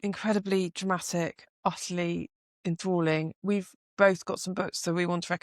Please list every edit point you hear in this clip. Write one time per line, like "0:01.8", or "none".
none